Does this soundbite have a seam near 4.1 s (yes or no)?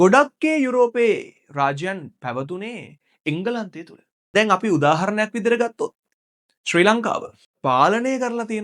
yes